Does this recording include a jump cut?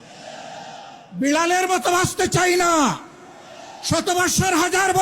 no; 0 cuts

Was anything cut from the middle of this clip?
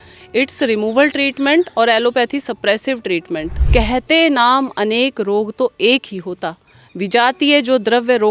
yes; 1 cut; at 3.6 s

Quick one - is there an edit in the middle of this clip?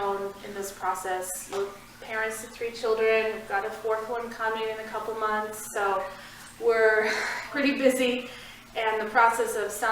yes; 2 cuts; at 1.5 s, 7.5 s

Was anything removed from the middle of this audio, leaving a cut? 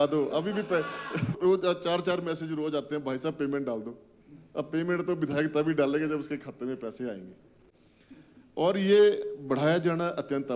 yes; 1 cut; at 1.3 s

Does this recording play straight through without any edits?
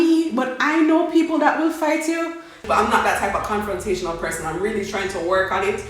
no; 1 cut; at 2.6 s

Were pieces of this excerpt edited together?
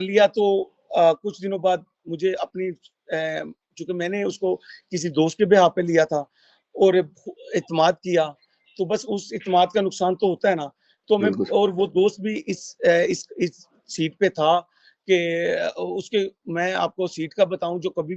no; 0 cuts

